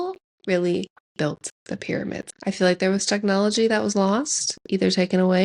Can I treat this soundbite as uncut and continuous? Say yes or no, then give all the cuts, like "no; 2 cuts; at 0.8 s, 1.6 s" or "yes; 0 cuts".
no; 1 cut; at 2.3 s